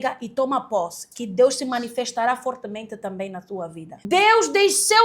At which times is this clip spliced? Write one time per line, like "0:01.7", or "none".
0:03.9